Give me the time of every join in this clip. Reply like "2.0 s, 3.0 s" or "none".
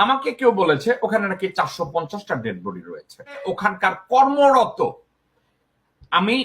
3.4 s